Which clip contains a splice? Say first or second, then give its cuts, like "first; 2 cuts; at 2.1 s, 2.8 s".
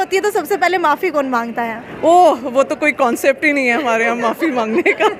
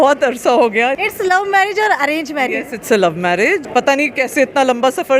second; 2 cuts; at 1.0 s, 3.7 s